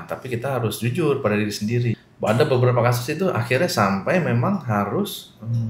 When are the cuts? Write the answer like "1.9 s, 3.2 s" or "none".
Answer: 1.9 s